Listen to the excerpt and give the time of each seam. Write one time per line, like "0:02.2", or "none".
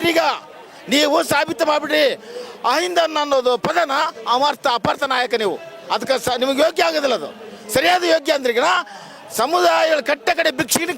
none